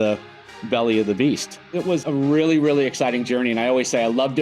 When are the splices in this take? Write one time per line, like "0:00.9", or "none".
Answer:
0:01.8